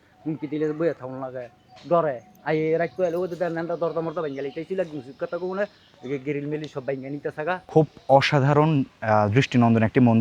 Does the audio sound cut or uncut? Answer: cut